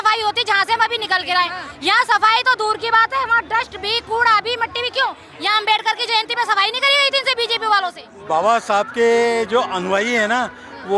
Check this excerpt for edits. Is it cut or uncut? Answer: cut